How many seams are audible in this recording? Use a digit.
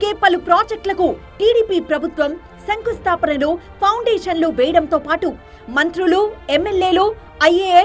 0